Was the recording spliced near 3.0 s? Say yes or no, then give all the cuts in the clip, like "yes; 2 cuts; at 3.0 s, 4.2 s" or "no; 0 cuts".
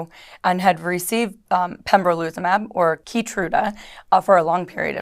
yes; 1 cut; at 3.0 s